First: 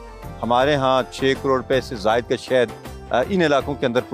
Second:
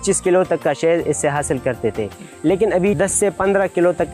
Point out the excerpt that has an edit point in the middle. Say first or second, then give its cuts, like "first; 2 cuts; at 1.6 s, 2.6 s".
second; 1 cut; at 3.0 s